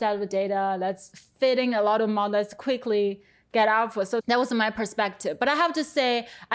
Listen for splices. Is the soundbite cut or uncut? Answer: uncut